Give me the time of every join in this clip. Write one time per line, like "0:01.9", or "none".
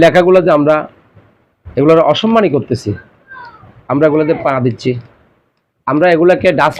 none